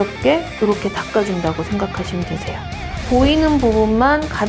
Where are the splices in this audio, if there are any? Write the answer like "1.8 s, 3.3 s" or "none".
2.9 s